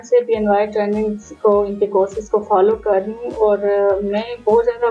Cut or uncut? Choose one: uncut